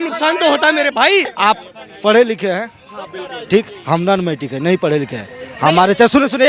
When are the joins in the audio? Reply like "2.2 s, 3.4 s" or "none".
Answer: 1.3 s

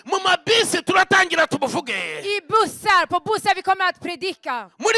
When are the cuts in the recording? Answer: none

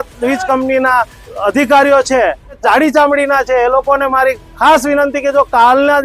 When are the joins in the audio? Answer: 1.3 s, 2.6 s

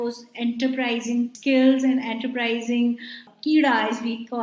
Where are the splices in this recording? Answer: 1.4 s, 3.3 s

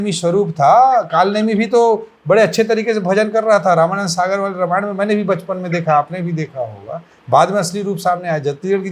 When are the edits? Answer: none

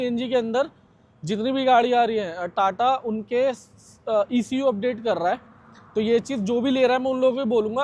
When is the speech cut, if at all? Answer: none

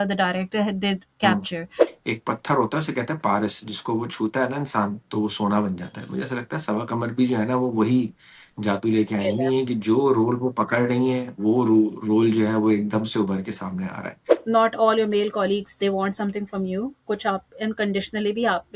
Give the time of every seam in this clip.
1.8 s, 14.3 s

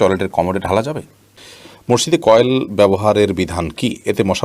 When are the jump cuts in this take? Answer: 1.5 s

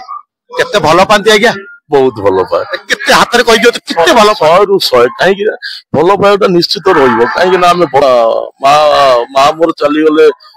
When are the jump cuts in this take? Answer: 8.0 s

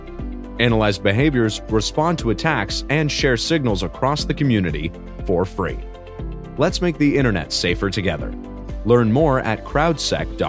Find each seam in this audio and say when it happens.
none

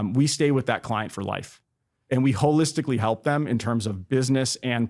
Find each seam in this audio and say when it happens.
1.9 s

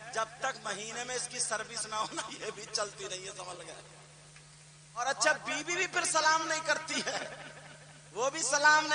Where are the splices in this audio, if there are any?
5.0 s

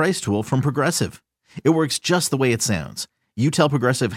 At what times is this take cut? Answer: none

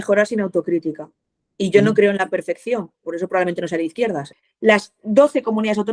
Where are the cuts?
4.3 s

